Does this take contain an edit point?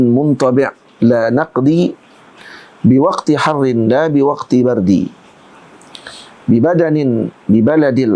no; 0 cuts

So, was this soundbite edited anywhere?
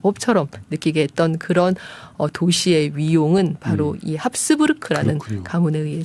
no; 0 cuts

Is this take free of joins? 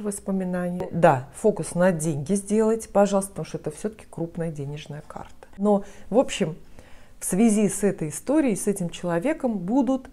no; 2 cuts; at 0.9 s, 5.6 s

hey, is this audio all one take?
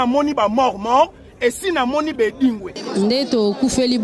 no; 1 cut; at 2.7 s

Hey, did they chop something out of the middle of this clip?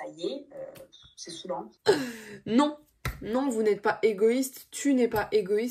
yes; 1 cut; at 1.7 s

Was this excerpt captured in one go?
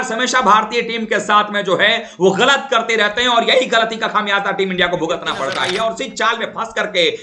no; 1 cut; at 5.6 s

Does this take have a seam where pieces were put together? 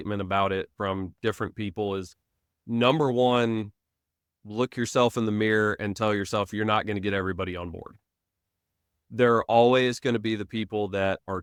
no; 0 cuts

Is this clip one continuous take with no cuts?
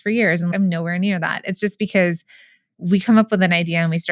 yes; 0 cuts

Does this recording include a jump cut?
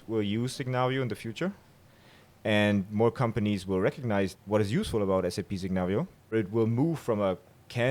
yes; 2 cuts; at 4.3 s, 6.3 s

